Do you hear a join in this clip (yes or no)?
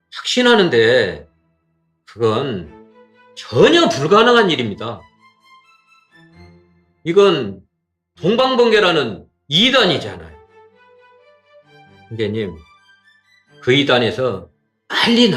yes